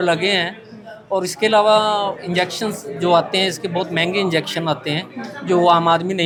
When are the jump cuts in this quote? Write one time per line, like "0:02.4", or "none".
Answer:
none